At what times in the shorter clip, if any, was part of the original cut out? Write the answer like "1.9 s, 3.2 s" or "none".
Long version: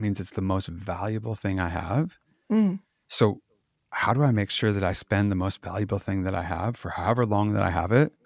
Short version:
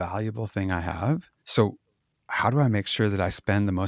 1.4 s